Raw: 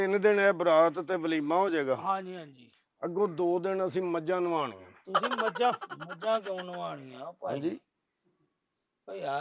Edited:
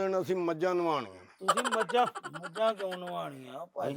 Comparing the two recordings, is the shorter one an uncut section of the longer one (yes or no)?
yes